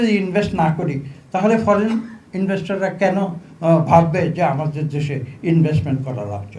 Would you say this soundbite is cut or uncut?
uncut